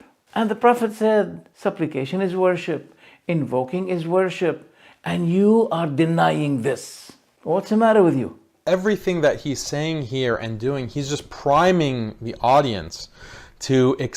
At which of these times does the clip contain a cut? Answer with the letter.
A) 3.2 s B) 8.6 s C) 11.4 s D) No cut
B